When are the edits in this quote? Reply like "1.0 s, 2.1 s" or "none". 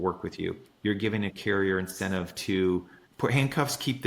3.0 s